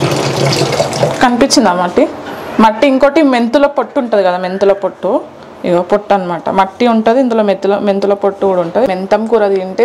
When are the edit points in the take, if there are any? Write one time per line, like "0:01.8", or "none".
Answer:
0:08.9